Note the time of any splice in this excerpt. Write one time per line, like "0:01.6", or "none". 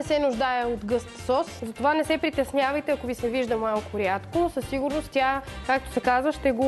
0:01.5